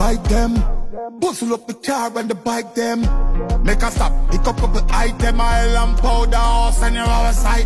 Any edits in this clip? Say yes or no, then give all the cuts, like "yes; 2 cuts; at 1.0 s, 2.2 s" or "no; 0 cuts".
no; 0 cuts